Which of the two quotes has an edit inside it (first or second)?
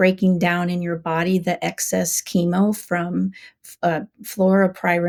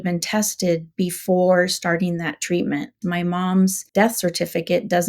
second